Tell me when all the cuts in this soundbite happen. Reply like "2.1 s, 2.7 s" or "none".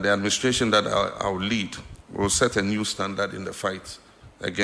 none